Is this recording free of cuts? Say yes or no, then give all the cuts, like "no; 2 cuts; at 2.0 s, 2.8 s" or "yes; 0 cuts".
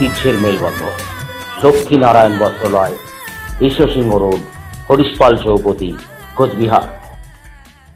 yes; 0 cuts